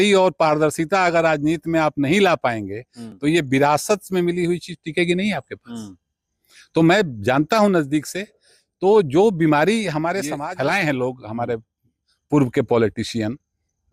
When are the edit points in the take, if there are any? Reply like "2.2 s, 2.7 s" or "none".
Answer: none

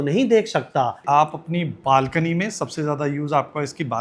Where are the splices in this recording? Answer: 1.0 s

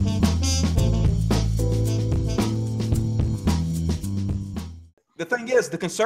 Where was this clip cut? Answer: 4.5 s

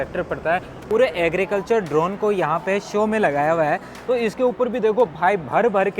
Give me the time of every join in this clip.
0.8 s, 3.9 s

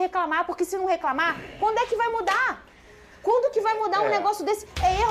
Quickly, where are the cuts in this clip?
none

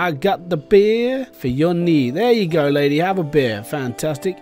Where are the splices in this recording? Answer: 1.3 s

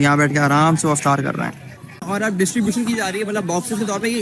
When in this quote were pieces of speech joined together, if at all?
2.0 s

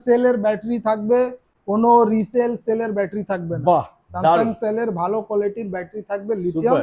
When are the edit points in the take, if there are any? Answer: none

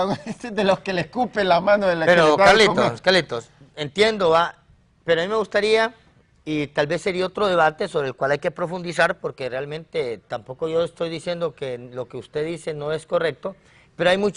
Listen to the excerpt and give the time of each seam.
none

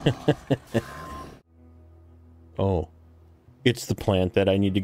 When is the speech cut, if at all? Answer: 1.3 s

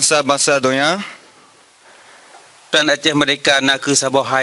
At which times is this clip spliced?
2.7 s

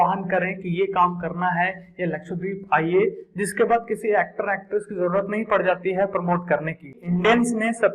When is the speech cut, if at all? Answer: 7.0 s

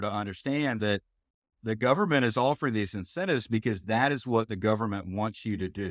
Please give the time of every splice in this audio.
none

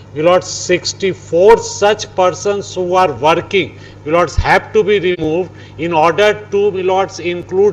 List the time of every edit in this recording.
none

